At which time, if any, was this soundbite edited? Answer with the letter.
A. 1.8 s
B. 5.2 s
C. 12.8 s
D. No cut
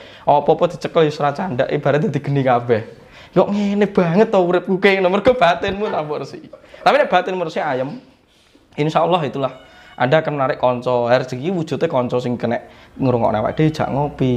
D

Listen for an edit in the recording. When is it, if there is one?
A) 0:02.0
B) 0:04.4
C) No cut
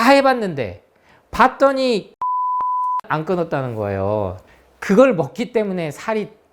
B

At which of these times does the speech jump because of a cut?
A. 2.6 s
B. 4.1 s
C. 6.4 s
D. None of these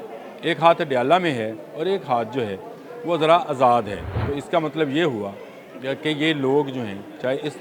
B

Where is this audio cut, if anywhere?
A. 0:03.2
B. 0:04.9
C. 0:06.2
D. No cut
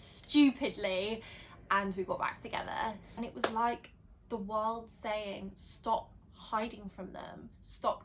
A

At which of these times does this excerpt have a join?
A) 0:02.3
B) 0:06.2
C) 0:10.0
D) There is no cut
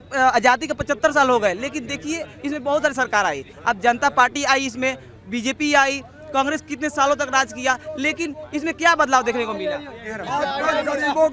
D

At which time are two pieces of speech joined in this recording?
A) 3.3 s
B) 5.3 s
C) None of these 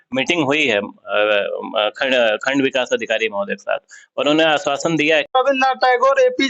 B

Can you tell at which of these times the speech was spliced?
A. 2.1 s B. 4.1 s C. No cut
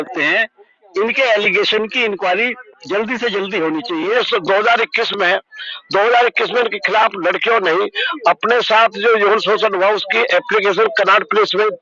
B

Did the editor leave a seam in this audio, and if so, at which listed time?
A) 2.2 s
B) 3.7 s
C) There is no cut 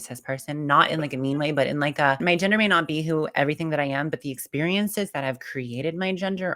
A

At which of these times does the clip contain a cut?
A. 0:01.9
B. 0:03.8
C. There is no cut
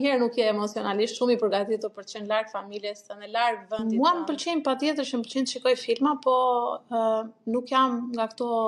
B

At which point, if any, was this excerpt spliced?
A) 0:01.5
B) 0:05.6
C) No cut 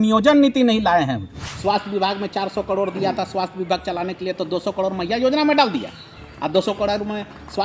A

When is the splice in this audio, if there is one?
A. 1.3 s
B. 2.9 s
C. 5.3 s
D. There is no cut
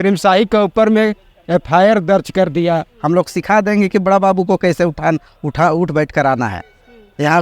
B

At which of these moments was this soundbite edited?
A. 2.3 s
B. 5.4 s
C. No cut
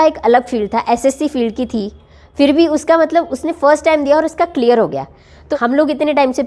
B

